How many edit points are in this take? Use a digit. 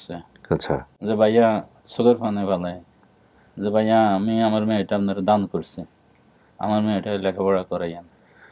0